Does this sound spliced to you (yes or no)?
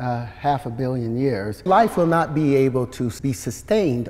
yes